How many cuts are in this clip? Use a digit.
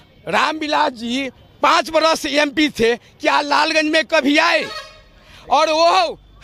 0